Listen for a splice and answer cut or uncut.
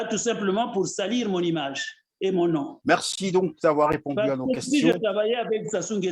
uncut